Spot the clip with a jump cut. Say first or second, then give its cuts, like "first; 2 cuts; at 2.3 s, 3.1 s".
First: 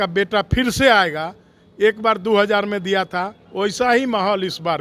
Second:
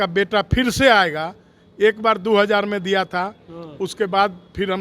first; 1 cut; at 3.4 s